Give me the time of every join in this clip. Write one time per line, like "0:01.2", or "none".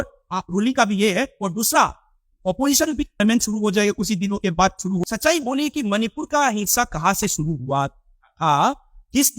0:03.2
0:05.0